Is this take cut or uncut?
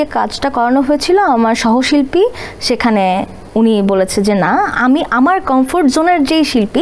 uncut